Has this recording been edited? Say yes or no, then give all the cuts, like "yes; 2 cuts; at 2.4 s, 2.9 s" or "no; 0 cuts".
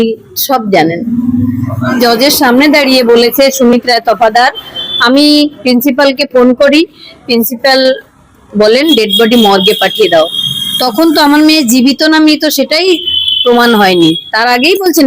yes; 1 cut; at 2.0 s